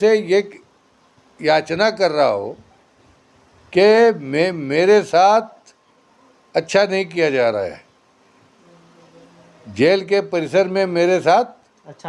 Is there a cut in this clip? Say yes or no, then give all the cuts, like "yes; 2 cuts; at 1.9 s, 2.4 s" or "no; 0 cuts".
no; 0 cuts